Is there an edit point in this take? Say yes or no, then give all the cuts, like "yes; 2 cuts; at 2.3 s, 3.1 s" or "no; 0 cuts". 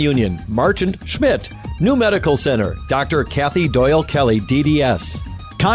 yes; 1 cut; at 4.7 s